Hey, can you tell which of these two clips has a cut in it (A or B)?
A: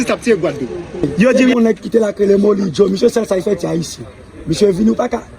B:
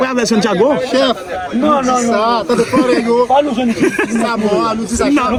A